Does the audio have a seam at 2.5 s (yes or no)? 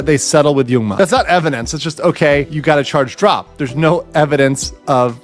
yes